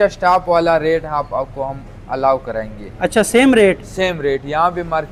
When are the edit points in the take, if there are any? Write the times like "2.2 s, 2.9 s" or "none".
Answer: none